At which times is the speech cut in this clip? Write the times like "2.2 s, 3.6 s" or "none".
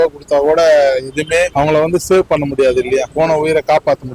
1.5 s, 3.1 s